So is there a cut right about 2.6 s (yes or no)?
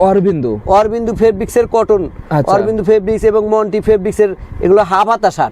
no